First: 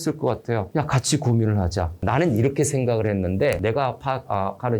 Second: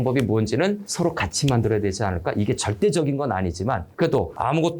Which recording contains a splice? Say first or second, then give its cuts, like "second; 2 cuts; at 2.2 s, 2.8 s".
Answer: first; 2 cuts; at 2.0 s, 3.6 s